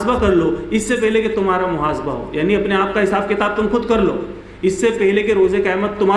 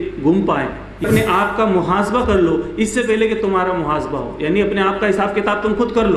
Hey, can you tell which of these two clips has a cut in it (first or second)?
second